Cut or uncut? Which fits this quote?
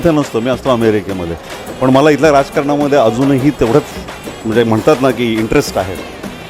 uncut